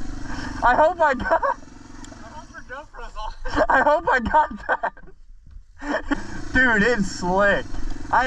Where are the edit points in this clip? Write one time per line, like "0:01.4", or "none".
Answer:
0:06.1